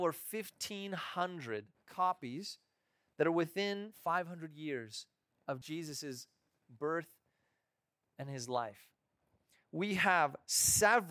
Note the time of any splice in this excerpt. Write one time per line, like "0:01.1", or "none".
0:01.8
0:03.9
0:05.6